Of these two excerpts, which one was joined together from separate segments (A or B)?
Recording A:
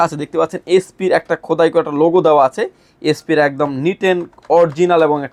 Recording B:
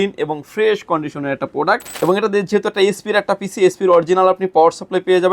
B